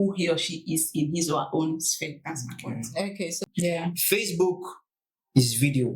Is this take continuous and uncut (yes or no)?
no